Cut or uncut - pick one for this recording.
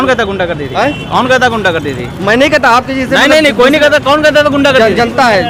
uncut